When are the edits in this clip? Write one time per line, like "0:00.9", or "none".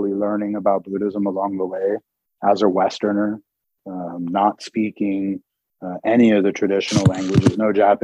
none